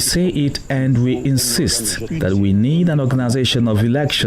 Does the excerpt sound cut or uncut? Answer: cut